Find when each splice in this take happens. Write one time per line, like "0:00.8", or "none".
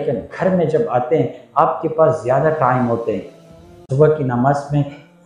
0:03.8